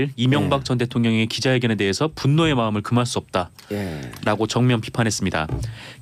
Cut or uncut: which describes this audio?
uncut